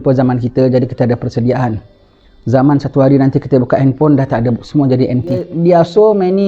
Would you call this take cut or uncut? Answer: cut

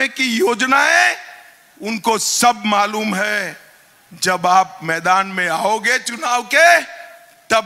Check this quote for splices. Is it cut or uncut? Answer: uncut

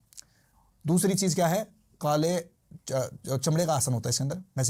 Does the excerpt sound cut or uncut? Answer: uncut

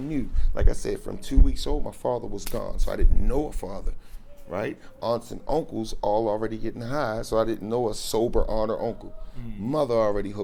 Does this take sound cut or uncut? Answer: uncut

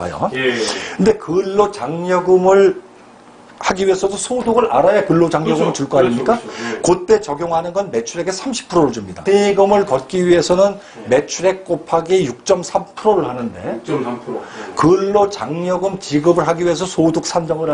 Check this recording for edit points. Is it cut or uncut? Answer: uncut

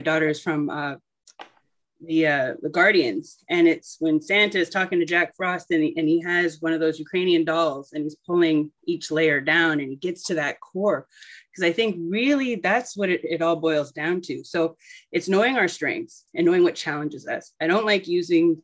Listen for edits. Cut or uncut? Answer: uncut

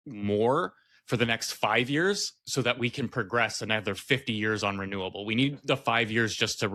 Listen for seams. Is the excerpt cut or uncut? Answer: uncut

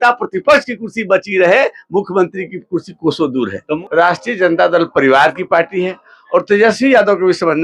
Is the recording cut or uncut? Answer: cut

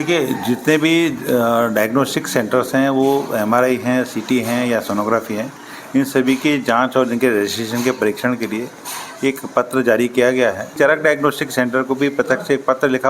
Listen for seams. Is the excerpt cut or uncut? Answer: cut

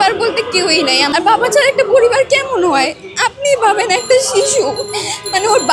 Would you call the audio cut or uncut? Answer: cut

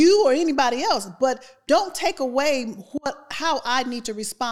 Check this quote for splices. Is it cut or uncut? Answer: uncut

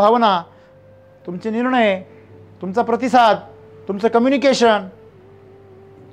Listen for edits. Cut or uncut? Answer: uncut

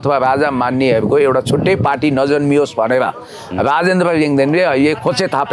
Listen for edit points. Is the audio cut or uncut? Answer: uncut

